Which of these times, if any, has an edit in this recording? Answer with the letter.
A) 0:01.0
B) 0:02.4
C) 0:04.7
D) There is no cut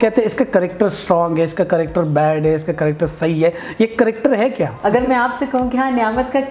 C